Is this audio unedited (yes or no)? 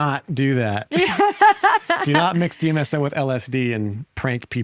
yes